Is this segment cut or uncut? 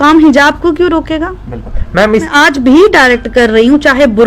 cut